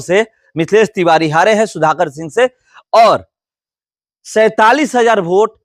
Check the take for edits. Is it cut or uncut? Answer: uncut